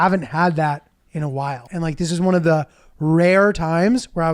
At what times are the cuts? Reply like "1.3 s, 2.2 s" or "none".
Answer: 1.6 s